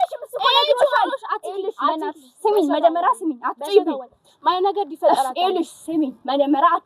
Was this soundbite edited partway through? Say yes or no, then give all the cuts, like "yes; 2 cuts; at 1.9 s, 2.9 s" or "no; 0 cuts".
no; 0 cuts